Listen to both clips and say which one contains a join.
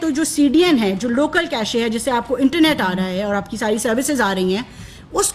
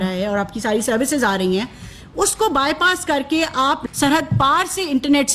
second; 1 cut; at 3.9 s

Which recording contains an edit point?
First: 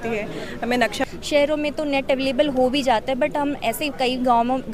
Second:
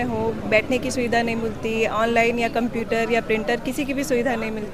first; 1 cut; at 1.0 s

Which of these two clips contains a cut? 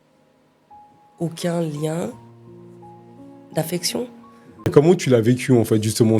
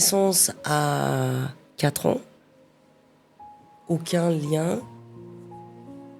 first; 1 cut; at 4.7 s

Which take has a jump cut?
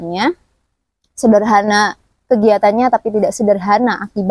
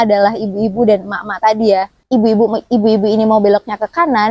second; 1 cut; at 1.9 s

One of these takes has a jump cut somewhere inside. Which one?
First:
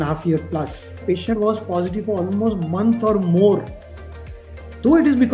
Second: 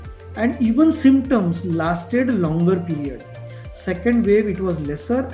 first; 1 cut; at 1.0 s

